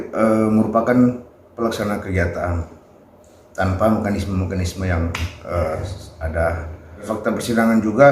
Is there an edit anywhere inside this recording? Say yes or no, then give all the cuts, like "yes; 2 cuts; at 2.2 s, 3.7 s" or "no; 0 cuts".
yes; 1 cut; at 7.0 s